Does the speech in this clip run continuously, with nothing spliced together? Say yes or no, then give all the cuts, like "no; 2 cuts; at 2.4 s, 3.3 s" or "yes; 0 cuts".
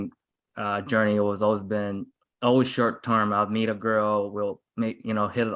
yes; 0 cuts